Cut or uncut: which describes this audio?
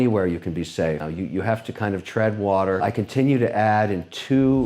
cut